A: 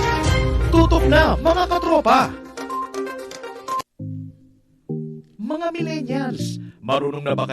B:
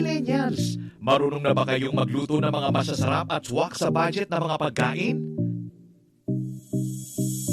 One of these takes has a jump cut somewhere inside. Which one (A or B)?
A